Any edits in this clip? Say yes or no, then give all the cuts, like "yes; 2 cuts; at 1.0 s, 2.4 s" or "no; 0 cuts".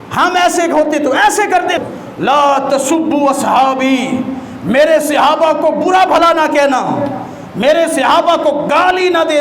yes; 1 cut; at 1.8 s